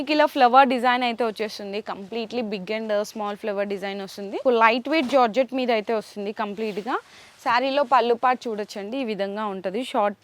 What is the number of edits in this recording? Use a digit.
1